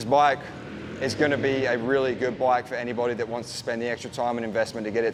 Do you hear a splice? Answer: no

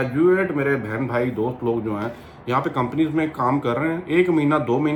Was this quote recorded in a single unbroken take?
yes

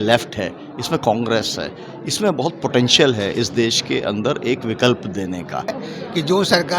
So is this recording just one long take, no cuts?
no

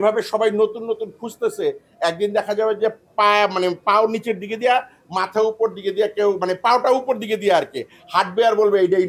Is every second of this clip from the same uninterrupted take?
yes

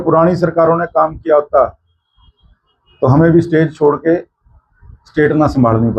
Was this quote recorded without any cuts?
yes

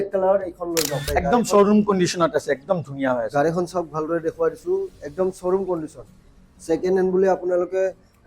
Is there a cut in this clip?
yes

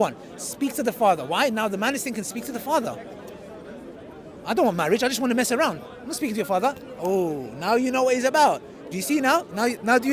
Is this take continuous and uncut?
yes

